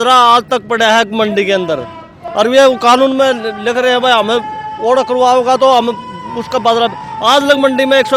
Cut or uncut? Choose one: uncut